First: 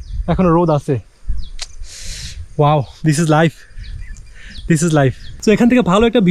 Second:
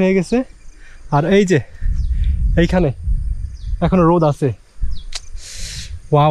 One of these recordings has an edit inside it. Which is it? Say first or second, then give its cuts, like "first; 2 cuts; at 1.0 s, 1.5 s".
first; 1 cut; at 5.3 s